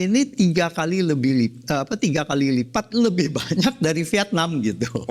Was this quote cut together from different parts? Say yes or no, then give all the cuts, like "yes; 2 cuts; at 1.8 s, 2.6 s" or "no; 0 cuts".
no; 0 cuts